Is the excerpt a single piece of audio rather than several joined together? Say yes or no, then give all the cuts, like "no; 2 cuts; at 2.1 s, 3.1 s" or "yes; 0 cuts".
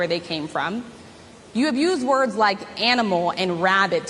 no; 1 cut; at 1.0 s